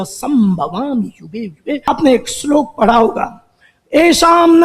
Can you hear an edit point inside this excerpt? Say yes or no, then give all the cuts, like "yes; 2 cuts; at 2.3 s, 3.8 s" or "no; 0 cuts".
yes; 1 cut; at 1.9 s